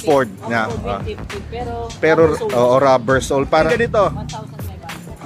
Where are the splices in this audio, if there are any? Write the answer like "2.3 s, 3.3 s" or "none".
3.7 s

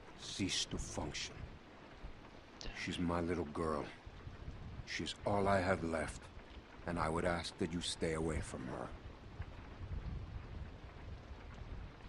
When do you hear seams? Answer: 2.8 s

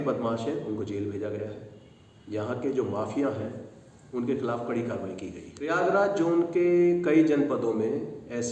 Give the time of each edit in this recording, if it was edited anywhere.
5.5 s

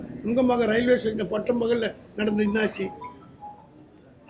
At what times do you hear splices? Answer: none

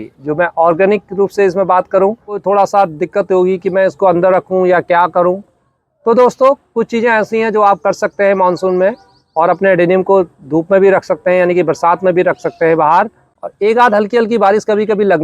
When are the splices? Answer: 2.3 s, 13.3 s

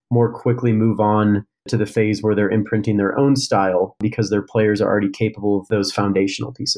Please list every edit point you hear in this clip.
1.7 s, 4.0 s, 5.7 s

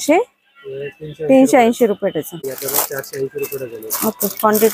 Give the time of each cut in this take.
2.5 s

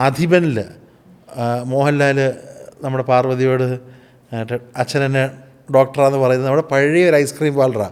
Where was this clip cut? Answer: none

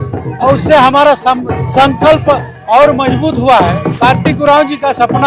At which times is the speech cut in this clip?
3.9 s

